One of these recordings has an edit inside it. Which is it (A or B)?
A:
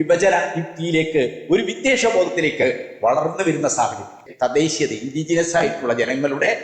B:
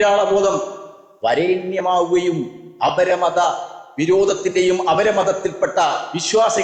A